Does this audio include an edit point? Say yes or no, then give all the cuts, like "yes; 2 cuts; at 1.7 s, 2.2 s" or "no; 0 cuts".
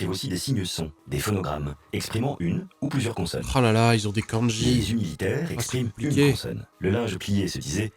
no; 0 cuts